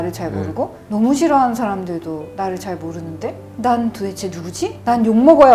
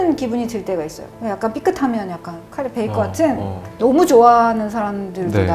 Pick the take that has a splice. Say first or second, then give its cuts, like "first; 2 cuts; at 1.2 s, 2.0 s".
second; 2 cuts; at 1.1 s, 3.6 s